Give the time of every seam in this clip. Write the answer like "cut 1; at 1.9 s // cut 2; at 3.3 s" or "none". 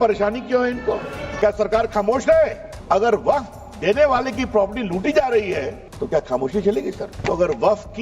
cut 1; at 1.3 s // cut 2; at 2.7 s // cut 3; at 5.8 s // cut 4; at 7.1 s